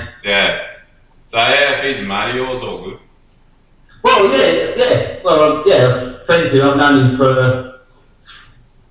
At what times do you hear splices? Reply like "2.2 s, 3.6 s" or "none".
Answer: none